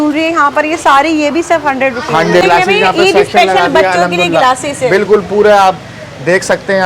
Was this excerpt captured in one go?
no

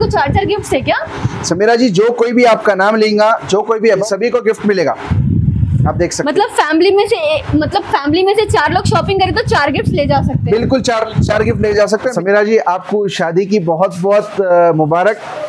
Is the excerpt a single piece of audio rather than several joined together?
no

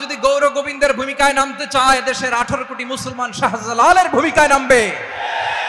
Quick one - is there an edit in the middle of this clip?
no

